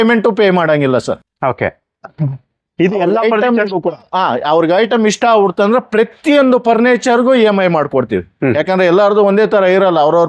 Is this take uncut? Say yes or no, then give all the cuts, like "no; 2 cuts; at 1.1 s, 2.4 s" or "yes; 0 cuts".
yes; 0 cuts